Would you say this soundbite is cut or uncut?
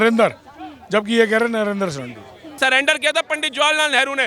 cut